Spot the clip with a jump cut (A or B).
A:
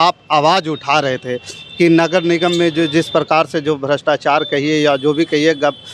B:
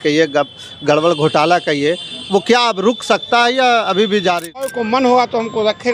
B